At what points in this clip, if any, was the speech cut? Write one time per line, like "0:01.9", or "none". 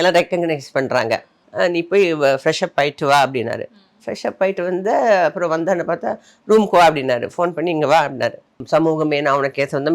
0:01.3
0:08.6